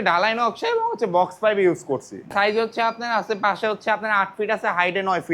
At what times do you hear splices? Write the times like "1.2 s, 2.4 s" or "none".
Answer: 2.3 s